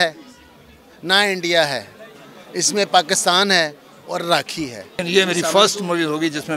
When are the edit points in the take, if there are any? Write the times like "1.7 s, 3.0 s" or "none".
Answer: 5.0 s